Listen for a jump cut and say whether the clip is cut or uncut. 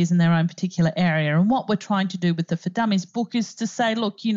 cut